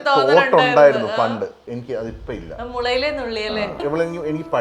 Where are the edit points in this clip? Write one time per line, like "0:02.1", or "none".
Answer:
0:01.7
0:03.8

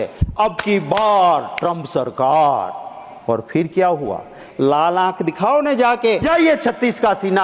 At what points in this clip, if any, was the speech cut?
0:04.4
0:06.2

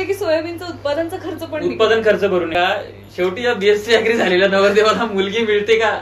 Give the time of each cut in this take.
0:02.5

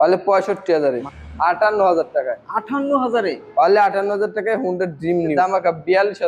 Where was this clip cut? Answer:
0:00.9
0:05.3

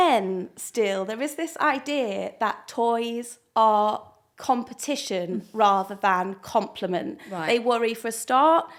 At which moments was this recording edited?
none

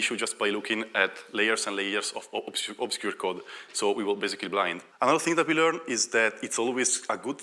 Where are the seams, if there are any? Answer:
0:04.8

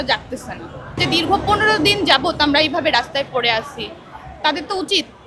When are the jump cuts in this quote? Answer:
0:01.0

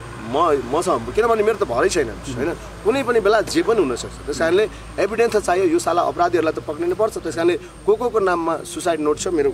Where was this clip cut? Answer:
none

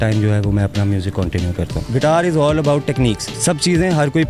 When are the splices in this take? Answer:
0:01.8
0:03.3

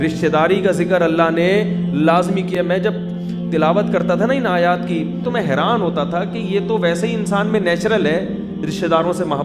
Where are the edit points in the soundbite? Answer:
none

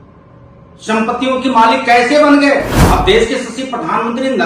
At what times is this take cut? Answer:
0:02.8

